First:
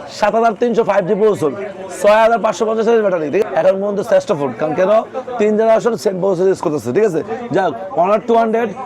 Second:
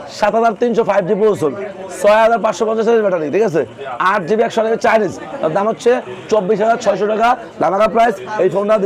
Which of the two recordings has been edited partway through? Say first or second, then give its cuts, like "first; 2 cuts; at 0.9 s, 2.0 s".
first; 1 cut; at 3.4 s